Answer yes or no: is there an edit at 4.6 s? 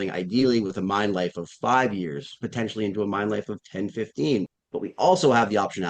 yes